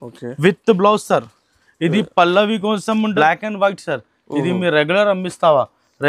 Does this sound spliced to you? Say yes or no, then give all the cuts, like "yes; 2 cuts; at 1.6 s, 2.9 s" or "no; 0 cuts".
yes; 1 cut; at 3.1 s